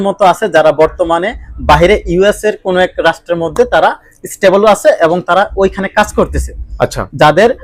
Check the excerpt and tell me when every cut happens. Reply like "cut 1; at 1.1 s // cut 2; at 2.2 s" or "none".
none